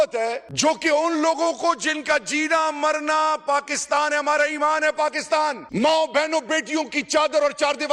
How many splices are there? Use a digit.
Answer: 0